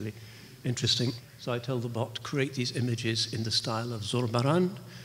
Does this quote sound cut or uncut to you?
cut